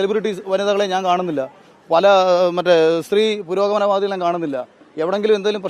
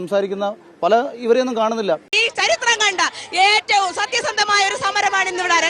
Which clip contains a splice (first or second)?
second